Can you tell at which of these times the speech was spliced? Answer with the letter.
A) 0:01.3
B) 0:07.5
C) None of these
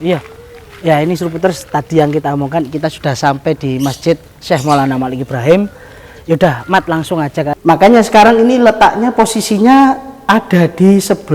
B